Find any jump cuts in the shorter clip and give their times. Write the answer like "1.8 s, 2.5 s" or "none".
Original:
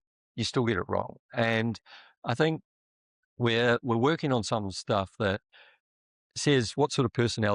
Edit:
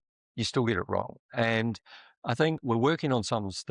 2.6 s